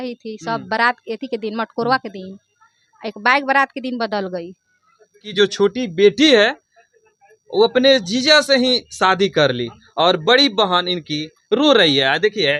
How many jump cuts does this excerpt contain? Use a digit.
0